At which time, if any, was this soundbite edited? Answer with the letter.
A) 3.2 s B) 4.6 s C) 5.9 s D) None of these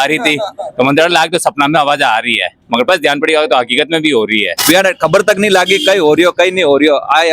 B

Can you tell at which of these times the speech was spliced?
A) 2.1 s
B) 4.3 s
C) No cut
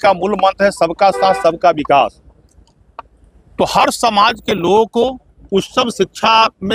C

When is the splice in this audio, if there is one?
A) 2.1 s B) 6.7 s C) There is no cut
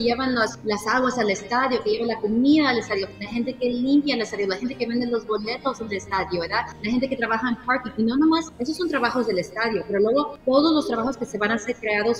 C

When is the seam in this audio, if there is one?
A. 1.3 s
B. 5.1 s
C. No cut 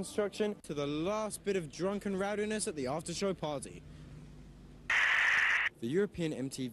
C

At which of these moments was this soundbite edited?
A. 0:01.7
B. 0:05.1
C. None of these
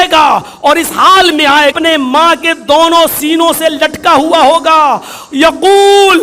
A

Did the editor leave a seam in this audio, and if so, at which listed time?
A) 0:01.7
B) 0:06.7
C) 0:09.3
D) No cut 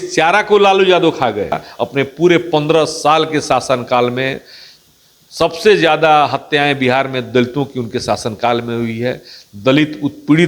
A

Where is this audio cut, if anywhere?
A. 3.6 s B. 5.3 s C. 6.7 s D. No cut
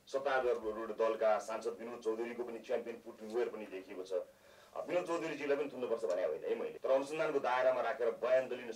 C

